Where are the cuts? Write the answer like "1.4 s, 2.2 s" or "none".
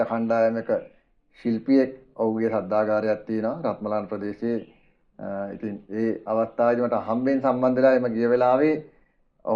none